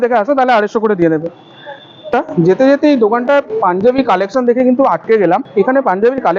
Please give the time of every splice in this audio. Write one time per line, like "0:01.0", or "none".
0:02.1
0:05.5